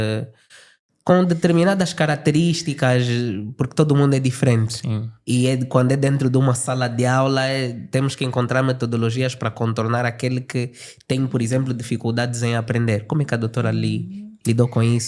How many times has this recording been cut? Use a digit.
0